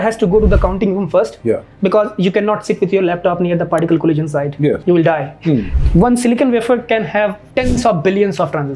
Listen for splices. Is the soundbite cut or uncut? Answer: cut